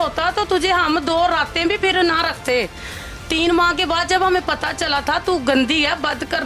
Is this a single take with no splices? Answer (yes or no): yes